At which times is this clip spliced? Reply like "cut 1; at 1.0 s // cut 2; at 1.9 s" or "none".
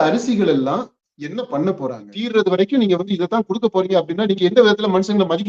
cut 1; at 2.1 s